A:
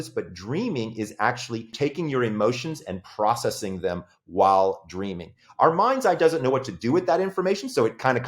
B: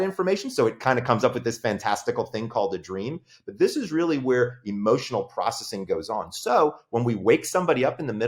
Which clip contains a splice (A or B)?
A